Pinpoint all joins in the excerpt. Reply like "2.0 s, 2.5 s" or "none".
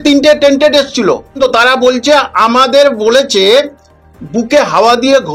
1.4 s